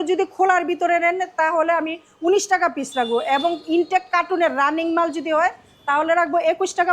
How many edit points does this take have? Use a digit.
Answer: 0